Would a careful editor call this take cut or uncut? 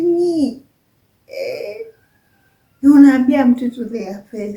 uncut